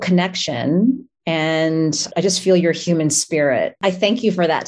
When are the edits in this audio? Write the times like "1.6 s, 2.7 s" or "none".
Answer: 2.0 s, 3.8 s